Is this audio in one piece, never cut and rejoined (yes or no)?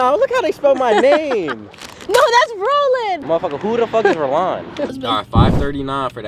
yes